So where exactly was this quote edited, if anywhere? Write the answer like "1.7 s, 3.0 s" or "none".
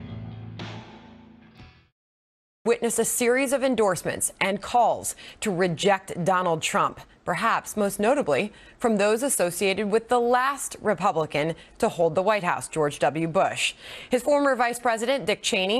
7.3 s